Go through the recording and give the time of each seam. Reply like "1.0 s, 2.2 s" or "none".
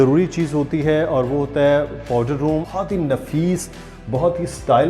2.7 s